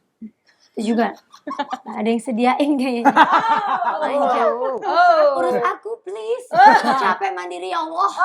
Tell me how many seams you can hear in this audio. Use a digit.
0